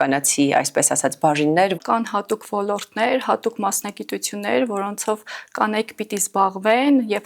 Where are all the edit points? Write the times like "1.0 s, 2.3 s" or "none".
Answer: 1.7 s